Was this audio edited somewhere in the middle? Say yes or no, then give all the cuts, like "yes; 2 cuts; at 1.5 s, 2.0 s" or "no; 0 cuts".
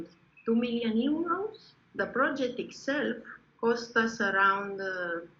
yes; 1 cut; at 1.9 s